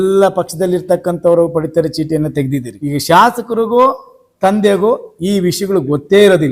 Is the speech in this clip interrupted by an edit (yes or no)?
yes